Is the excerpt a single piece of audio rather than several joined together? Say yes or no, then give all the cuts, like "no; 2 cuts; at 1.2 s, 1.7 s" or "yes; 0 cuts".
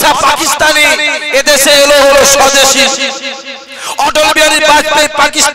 yes; 0 cuts